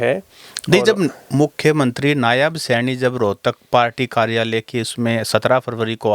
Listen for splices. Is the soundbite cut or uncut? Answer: uncut